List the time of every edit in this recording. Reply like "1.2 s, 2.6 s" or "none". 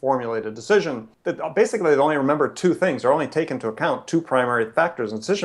1.1 s